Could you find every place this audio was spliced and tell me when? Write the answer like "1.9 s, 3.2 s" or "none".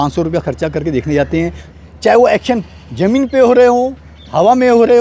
1.6 s